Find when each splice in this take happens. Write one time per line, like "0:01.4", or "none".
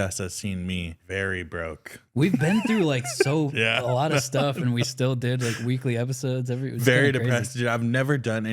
0:01.0